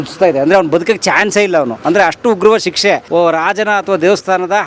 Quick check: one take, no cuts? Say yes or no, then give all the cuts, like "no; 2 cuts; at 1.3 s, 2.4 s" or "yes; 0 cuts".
no; 1 cut; at 3.0 s